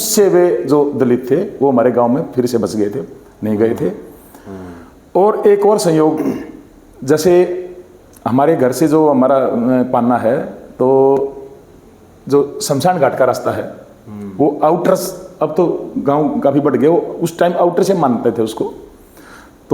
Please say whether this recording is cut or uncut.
uncut